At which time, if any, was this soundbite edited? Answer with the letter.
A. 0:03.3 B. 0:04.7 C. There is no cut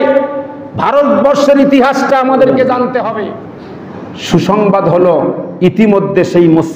A